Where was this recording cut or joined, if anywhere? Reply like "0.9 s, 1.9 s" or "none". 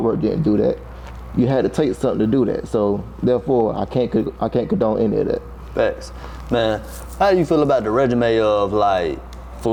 none